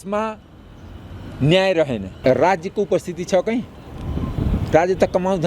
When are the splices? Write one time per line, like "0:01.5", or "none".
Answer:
0:02.1

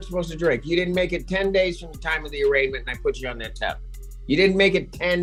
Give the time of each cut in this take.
none

